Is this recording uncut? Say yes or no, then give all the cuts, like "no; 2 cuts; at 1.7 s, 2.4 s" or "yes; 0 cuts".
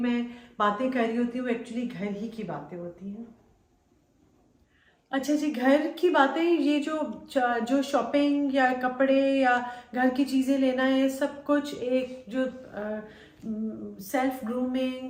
yes; 0 cuts